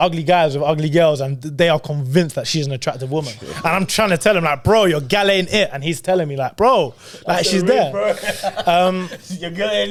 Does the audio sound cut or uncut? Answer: uncut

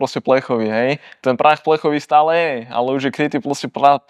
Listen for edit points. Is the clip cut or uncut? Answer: uncut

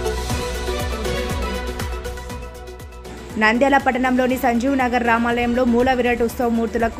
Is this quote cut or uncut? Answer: cut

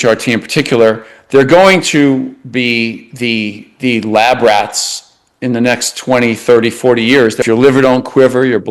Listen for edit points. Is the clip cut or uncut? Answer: cut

